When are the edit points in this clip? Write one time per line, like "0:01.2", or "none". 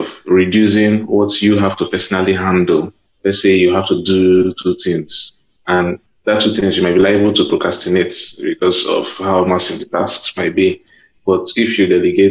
0:03.0
0:05.8